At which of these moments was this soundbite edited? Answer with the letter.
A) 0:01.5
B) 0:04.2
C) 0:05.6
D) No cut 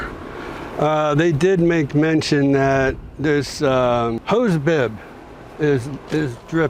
B